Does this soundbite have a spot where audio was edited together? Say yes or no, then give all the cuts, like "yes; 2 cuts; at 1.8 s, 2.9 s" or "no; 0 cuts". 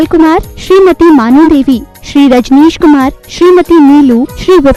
no; 0 cuts